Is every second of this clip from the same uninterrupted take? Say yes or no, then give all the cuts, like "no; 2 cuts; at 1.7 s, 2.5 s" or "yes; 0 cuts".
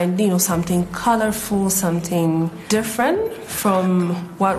no; 2 cuts; at 2.6 s, 3.5 s